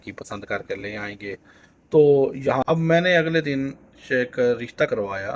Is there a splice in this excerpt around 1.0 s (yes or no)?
no